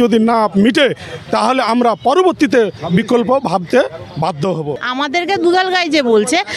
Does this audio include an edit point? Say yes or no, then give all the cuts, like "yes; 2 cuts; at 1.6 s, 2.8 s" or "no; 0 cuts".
yes; 1 cut; at 4.8 s